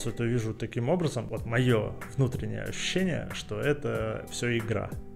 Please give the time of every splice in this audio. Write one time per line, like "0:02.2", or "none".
0:01.3
0:02.0